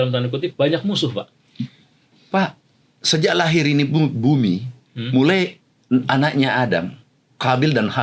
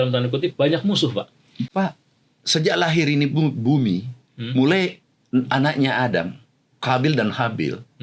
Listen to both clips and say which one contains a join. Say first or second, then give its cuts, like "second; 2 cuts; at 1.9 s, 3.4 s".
second; 1 cut; at 1.7 s